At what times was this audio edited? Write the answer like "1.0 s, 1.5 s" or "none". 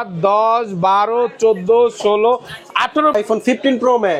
3.1 s